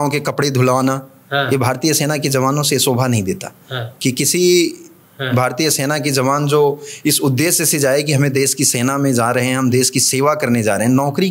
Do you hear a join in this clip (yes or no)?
no